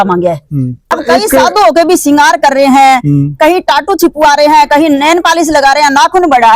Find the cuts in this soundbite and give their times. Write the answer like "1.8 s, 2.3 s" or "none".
0.9 s